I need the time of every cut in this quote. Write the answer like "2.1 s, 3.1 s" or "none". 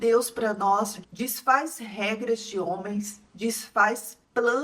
none